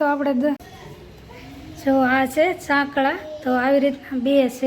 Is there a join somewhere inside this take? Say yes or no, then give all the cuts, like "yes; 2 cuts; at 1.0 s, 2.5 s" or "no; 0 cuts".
yes; 1 cut; at 1.2 s